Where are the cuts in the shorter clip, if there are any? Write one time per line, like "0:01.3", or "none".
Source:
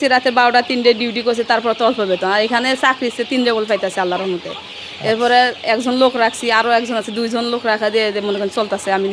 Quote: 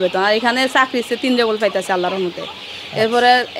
none